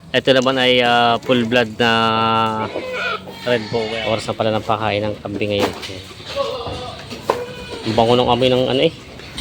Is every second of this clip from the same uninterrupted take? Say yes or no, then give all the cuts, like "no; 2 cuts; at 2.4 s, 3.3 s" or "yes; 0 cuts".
no; 1 cut; at 4.3 s